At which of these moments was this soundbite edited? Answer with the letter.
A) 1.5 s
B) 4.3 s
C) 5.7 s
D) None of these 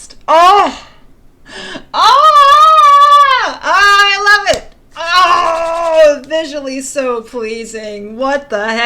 D